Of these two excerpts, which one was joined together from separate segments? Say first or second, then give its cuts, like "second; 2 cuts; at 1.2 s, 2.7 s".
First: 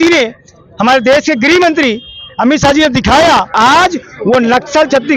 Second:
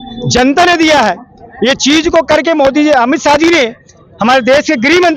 first; 1 cut; at 3.5 s